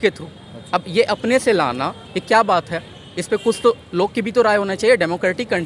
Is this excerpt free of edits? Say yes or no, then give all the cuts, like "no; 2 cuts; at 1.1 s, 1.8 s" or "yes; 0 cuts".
yes; 0 cuts